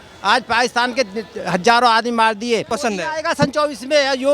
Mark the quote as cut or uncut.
cut